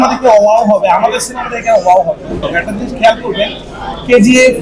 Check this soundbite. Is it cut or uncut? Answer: cut